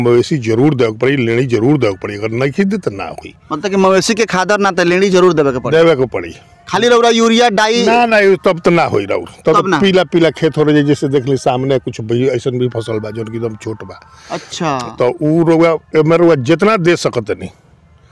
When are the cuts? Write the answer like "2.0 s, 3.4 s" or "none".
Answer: none